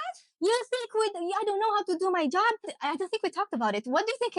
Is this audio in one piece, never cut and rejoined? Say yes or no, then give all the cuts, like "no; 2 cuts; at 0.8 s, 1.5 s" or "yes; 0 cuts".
no; 1 cut; at 2.7 s